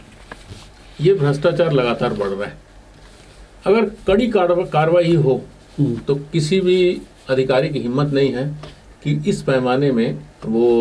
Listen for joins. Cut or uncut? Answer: uncut